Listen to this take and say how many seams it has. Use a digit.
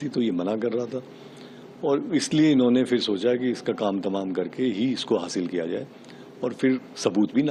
0